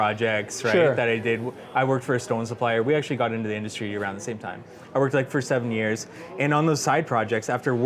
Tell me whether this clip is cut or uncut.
uncut